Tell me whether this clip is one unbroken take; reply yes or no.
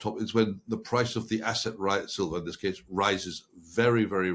yes